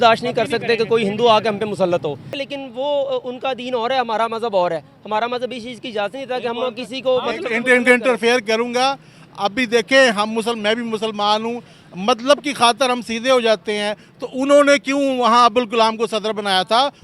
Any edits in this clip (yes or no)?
yes